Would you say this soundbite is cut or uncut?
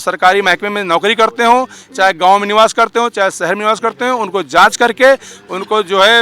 uncut